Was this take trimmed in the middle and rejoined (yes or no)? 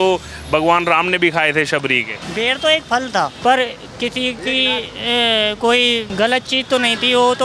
yes